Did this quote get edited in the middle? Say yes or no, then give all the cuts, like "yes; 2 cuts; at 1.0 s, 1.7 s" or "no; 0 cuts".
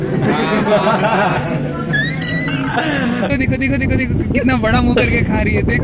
yes; 1 cut; at 3.3 s